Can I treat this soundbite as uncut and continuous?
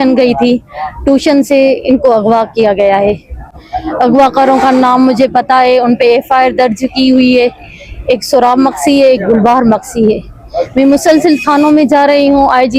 yes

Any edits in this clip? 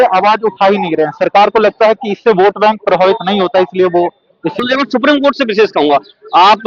yes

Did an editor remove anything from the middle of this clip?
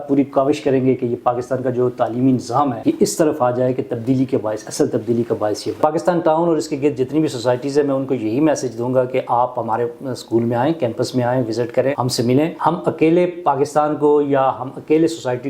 yes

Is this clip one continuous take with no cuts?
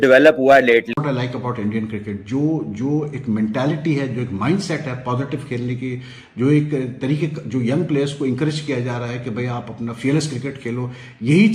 no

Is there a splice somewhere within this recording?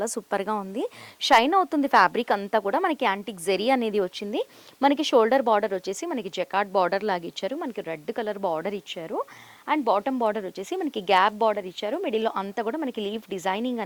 no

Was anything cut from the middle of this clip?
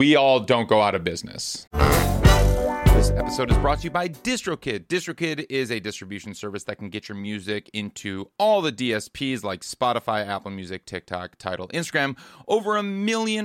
yes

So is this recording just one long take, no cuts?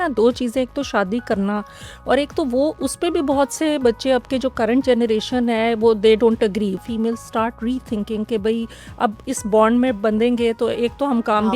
no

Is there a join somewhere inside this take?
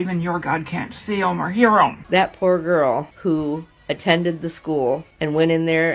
yes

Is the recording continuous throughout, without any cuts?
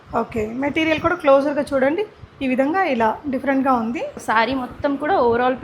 no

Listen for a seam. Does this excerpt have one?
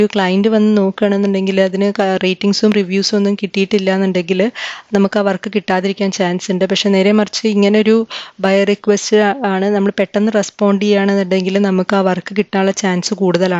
no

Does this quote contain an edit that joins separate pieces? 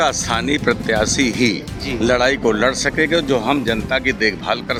no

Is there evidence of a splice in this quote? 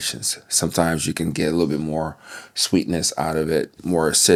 no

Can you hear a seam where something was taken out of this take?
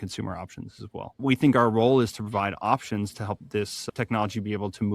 yes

